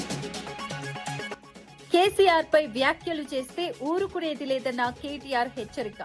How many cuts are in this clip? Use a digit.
1